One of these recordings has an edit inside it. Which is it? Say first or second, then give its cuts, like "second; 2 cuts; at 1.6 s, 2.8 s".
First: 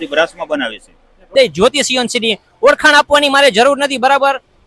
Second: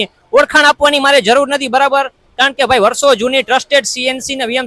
first; 1 cut; at 1.3 s